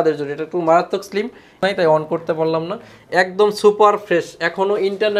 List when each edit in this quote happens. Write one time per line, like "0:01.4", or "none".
0:01.6